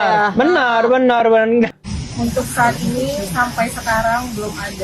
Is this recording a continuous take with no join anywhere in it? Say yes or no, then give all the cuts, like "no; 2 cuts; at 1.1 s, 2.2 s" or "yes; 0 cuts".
no; 1 cut; at 1.7 s